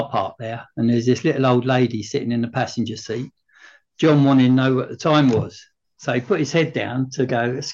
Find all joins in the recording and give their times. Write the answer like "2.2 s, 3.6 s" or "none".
none